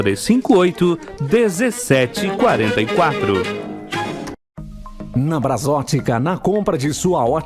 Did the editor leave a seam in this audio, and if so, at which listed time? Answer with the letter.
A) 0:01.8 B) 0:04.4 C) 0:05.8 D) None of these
D